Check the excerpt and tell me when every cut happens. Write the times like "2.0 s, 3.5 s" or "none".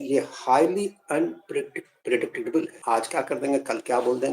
2.8 s